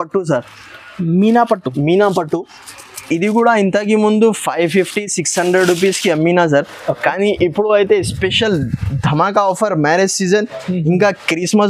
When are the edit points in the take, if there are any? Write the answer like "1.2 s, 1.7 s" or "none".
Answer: none